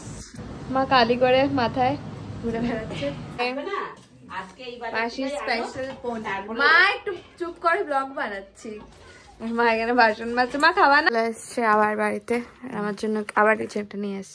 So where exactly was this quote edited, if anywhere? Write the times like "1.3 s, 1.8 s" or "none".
3.4 s, 11.1 s